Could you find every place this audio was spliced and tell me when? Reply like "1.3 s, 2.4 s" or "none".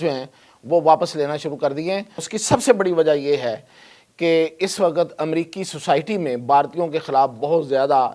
2.2 s